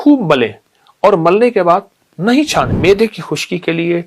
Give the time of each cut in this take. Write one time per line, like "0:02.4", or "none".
0:02.7

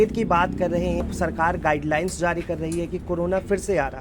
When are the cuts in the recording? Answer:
0:01.0

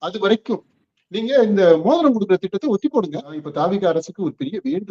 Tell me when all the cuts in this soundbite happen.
0:03.5

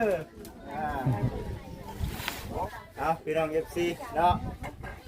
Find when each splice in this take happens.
0:02.7

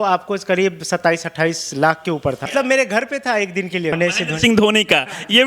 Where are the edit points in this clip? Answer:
0:02.5
0:03.9

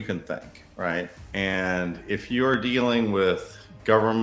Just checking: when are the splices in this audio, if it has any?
0:01.2

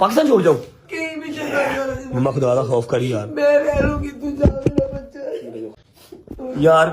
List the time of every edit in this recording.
0:05.7

